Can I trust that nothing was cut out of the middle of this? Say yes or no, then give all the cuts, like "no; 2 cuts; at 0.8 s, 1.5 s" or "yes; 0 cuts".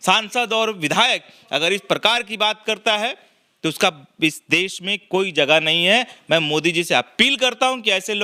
yes; 0 cuts